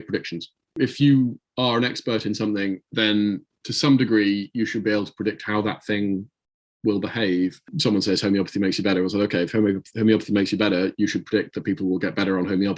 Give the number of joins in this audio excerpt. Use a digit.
2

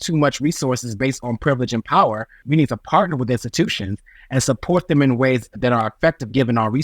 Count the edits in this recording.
2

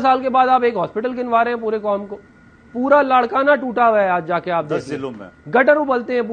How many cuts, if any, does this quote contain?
0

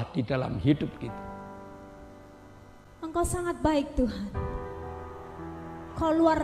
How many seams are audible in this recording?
1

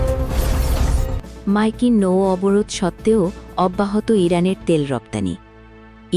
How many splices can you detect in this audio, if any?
1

